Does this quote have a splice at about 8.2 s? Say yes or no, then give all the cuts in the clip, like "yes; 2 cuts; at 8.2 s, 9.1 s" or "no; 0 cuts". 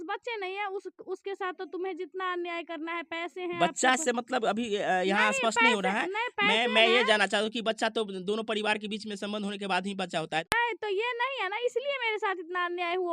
no; 1 cut; at 10.5 s